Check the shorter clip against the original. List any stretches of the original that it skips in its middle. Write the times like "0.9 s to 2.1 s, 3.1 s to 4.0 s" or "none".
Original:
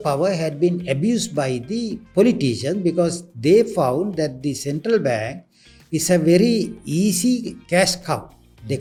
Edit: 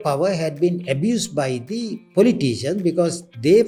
none